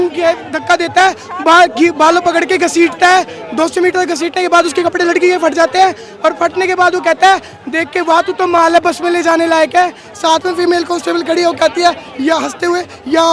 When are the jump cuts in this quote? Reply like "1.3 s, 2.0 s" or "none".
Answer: none